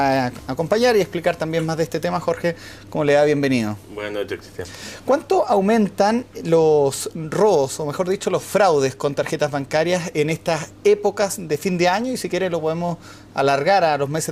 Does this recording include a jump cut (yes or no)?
yes